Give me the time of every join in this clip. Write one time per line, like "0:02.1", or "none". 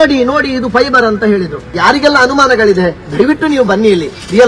0:01.7